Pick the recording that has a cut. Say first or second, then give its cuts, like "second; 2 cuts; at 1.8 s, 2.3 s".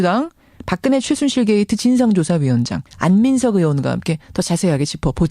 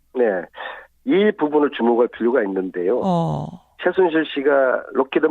second; 1 cut; at 1.1 s